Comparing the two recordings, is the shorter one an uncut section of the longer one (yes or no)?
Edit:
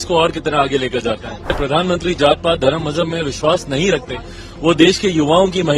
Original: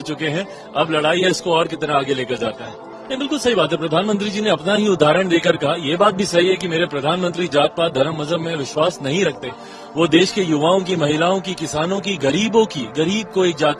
no